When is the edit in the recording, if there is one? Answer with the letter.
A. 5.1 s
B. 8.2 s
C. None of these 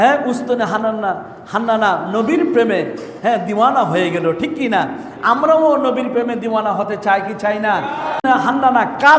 B